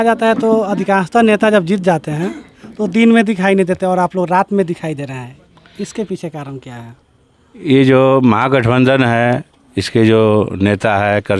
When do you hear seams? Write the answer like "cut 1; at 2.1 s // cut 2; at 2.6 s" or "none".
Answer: none